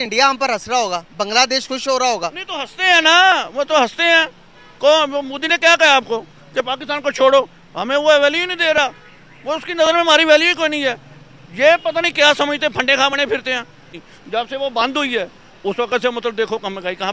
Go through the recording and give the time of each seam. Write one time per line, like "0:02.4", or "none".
0:13.9